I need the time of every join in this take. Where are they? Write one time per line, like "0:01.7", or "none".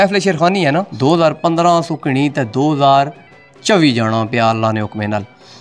0:00.9